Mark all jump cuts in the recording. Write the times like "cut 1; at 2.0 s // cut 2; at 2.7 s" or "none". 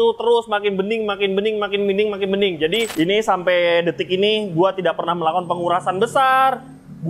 cut 1; at 2.9 s